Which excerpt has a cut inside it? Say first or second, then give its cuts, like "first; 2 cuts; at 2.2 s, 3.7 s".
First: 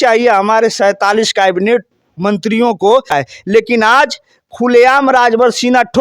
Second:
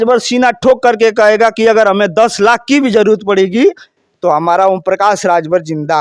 first; 1 cut; at 3.2 s